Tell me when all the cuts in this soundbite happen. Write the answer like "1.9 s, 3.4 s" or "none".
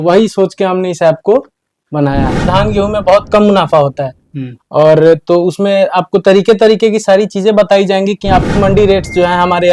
2.5 s, 8.5 s